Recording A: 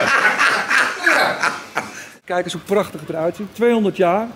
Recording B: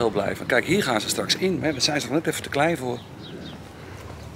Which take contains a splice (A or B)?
A